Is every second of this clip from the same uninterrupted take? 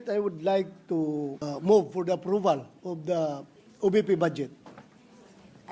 no; 1 cut; at 1.5 s

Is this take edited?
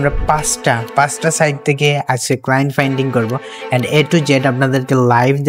no; 0 cuts

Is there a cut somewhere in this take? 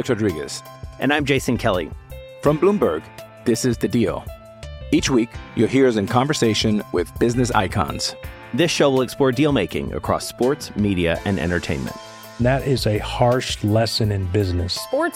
no; 0 cuts

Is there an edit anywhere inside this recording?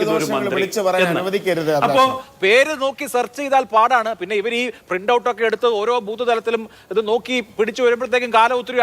yes; 1 cut; at 2.3 s

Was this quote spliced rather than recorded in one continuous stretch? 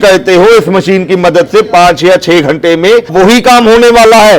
yes; 1 cut; at 3.1 s

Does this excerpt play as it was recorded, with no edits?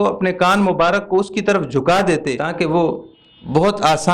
no; 1 cut; at 2.4 s

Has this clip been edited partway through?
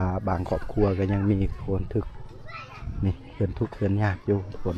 no; 0 cuts

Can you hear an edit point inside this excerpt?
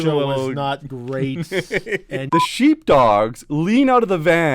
yes; 1 cut; at 2.2 s

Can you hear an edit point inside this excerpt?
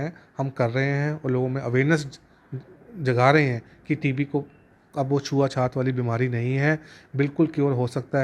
no; 0 cuts

